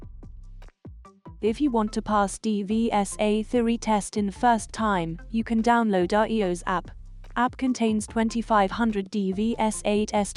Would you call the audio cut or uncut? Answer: cut